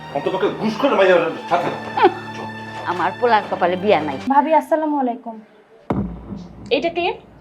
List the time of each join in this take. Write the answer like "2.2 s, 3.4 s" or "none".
4.2 s

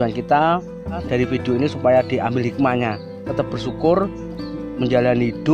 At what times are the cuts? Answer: 1.0 s

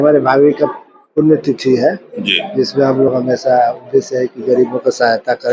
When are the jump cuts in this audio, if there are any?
none

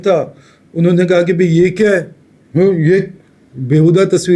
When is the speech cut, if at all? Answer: none

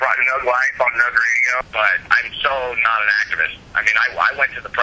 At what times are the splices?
1.6 s

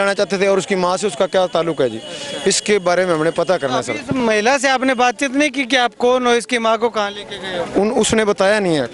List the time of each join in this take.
none

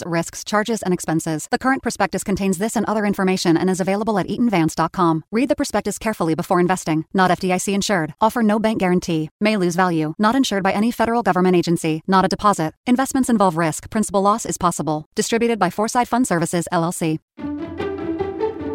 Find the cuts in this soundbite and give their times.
17.3 s

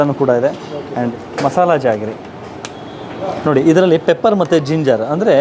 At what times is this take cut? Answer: 1.1 s

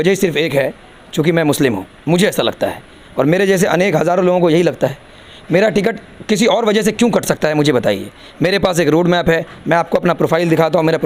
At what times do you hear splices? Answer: none

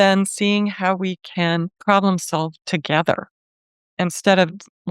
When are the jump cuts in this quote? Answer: 1.7 s

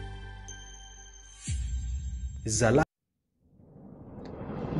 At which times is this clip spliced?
2.8 s

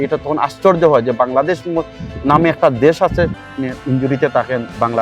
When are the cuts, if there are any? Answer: 3.4 s

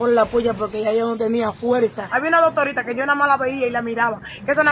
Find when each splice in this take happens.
2.0 s

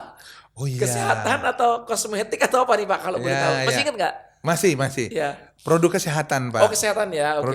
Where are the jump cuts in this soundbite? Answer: none

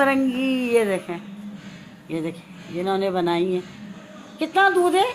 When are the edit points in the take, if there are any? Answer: none

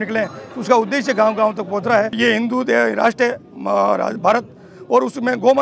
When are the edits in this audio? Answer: 2.2 s

